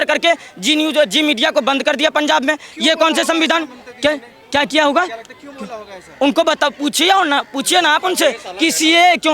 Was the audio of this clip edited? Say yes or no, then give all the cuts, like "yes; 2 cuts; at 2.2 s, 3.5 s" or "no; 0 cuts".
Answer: no; 0 cuts